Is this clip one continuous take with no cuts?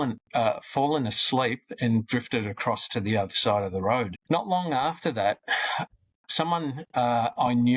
no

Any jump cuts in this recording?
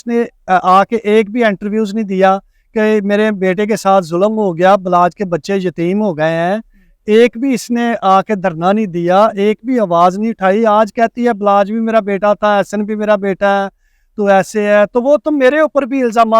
no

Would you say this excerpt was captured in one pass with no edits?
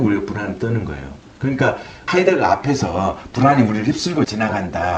yes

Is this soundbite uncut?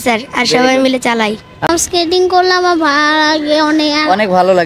no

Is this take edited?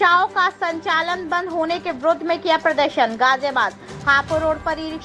no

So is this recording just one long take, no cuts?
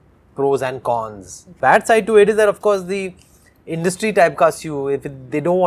no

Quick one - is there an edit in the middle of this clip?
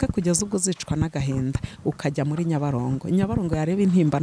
no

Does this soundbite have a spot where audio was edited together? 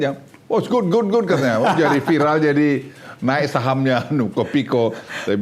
no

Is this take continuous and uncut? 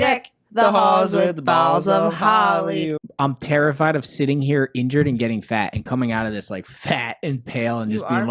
no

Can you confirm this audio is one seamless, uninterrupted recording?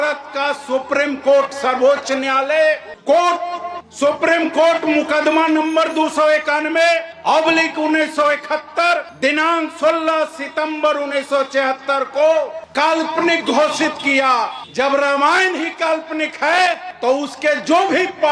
yes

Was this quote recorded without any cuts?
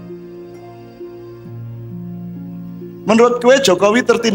yes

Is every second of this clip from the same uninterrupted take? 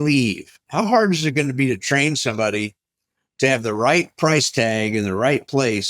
yes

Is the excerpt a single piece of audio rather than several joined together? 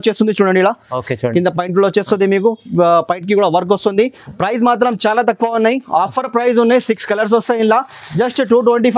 yes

